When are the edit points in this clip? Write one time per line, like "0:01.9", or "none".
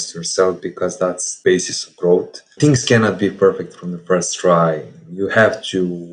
0:01.3